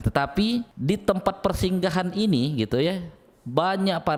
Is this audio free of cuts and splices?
yes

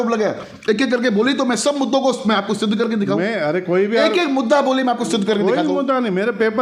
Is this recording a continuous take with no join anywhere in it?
yes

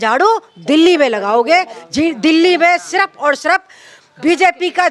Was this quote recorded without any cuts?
yes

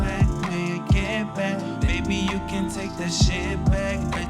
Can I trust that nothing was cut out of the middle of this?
yes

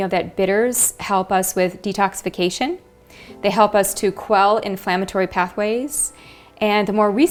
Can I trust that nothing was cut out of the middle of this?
yes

